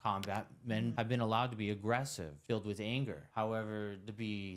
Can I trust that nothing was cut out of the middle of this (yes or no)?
no